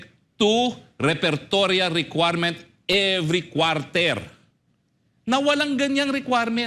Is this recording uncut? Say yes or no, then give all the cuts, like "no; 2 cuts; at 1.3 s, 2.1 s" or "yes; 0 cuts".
yes; 0 cuts